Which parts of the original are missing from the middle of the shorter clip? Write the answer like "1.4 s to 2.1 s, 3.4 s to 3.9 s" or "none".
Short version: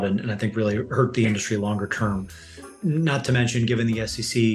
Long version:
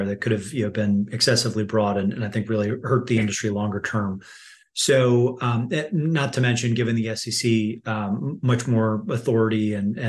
4.7 s to 5.9 s